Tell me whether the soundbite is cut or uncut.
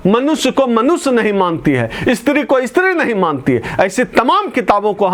uncut